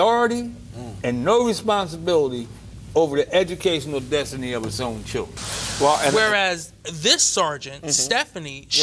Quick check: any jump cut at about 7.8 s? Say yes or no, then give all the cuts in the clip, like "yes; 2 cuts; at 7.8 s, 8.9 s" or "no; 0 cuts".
no; 1 cut; at 6.1 s